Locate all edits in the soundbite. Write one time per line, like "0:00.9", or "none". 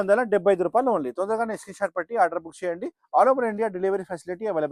none